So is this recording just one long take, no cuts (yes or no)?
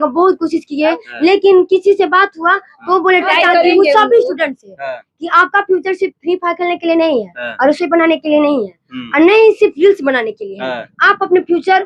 no